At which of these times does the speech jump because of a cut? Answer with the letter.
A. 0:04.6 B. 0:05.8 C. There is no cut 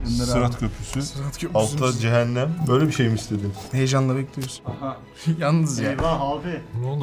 A